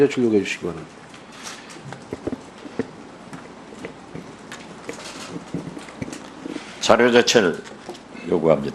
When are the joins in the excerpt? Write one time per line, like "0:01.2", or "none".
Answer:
0:04.0

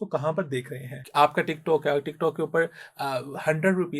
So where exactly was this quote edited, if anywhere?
0:01.0

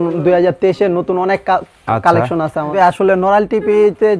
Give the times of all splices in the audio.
0:02.7

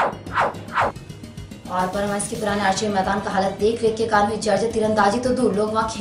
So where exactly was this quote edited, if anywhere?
0:01.1

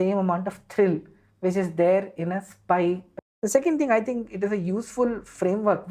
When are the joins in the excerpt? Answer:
0:03.1

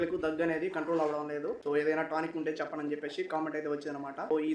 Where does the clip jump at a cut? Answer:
none

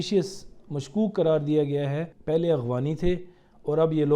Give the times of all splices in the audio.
0:02.1

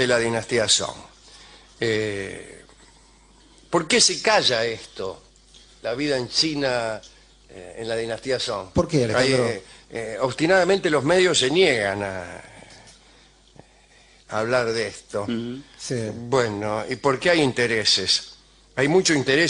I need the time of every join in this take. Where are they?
0:15.1

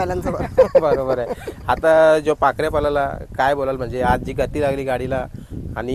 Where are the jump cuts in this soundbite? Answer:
none

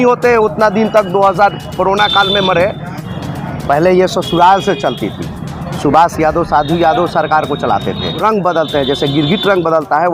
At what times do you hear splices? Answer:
0:02.9
0:08.2

